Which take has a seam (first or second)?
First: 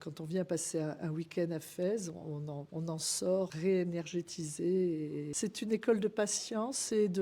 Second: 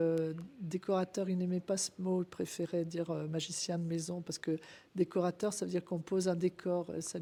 first